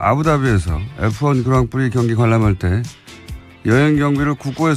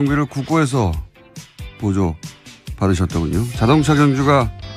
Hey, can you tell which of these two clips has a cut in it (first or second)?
second